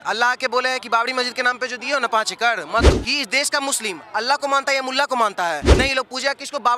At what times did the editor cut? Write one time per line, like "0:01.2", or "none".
0:02.9
0:05.7